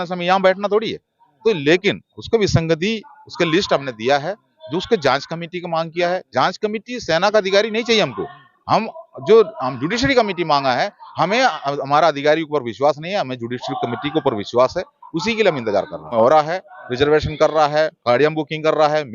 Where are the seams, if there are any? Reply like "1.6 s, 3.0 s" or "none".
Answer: 16.1 s